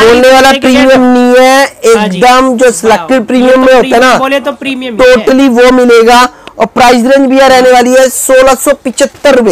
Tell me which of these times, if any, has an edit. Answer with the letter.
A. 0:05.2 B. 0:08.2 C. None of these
C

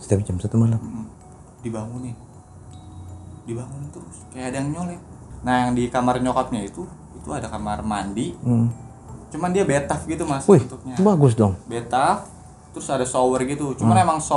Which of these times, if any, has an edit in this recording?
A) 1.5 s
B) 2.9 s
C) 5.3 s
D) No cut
C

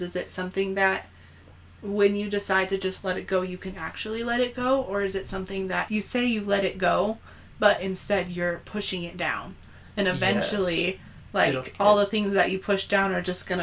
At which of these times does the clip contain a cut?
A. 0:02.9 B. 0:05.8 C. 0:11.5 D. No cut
B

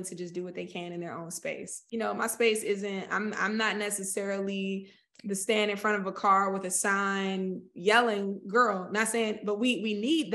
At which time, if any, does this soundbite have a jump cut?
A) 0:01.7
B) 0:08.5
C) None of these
A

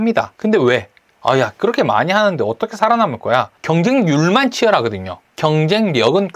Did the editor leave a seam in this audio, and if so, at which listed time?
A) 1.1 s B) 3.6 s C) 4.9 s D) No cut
B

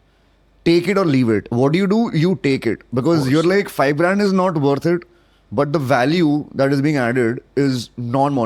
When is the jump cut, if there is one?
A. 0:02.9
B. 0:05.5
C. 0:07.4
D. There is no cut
D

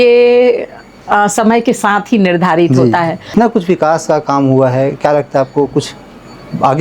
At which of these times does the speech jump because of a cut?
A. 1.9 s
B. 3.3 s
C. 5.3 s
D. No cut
B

